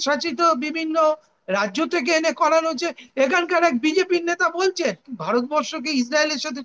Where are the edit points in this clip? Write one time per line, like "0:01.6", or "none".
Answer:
0:05.1